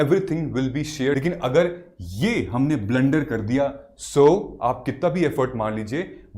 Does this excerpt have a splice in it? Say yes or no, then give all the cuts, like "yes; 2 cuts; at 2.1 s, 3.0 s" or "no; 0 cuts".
yes; 1 cut; at 1.2 s